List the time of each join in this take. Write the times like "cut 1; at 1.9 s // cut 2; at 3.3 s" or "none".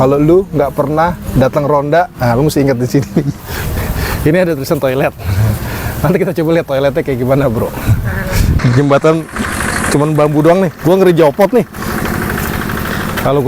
cut 1; at 3.4 s // cut 2; at 8.6 s